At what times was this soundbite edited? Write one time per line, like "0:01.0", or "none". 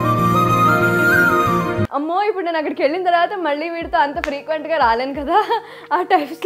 0:01.9